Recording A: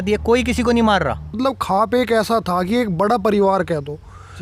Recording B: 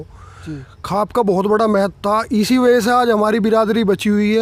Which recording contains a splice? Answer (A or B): A